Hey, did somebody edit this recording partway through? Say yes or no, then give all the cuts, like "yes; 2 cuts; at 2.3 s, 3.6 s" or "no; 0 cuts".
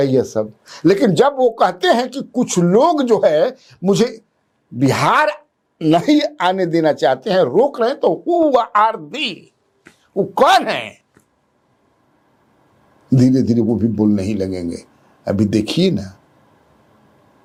no; 0 cuts